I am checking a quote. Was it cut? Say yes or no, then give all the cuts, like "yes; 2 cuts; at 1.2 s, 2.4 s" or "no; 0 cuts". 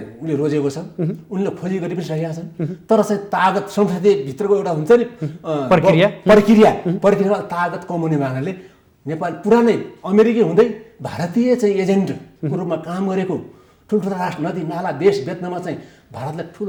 no; 0 cuts